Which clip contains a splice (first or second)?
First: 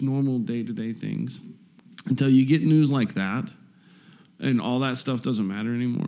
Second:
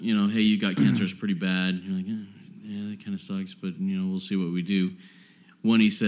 first